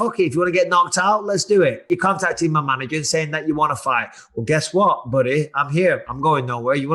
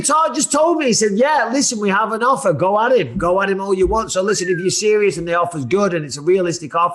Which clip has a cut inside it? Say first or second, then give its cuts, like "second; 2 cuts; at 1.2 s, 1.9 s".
first; 1 cut; at 1.9 s